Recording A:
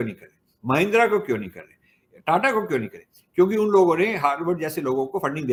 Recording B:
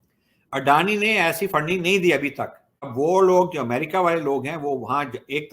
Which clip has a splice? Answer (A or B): B